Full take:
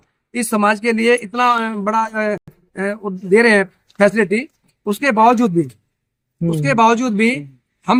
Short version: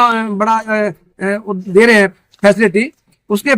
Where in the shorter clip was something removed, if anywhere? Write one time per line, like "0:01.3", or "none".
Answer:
0:01.1

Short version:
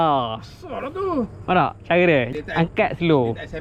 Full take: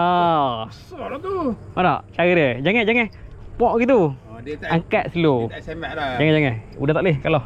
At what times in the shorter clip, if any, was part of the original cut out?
0:02.3

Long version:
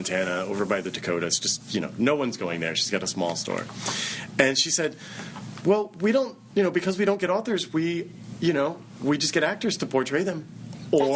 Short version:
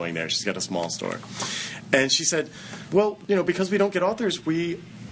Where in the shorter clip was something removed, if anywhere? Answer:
0:03.1

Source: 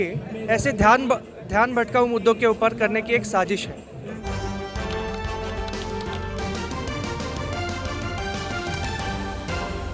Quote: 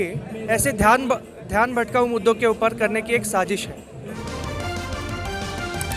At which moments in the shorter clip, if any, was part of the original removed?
0:04.2

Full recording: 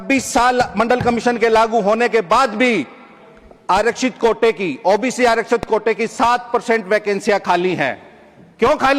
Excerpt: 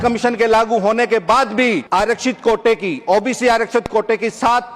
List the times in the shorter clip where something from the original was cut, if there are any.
0:01.8

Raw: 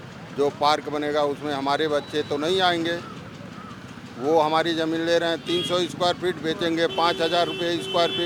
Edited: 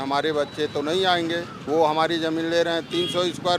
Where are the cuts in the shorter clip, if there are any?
0:01.5

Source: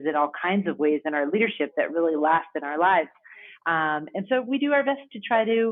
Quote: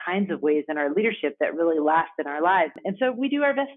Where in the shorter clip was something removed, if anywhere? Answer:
0:02.8

